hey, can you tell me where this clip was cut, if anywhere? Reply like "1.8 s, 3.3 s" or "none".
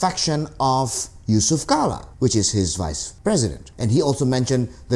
2.1 s, 3.0 s, 3.7 s